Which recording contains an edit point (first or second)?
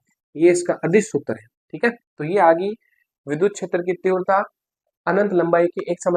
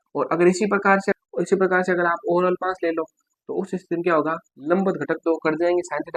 second